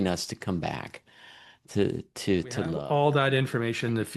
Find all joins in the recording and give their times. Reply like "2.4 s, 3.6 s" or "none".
2.7 s